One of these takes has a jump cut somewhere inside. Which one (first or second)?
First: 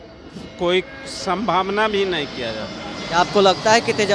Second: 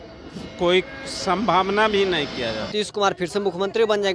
second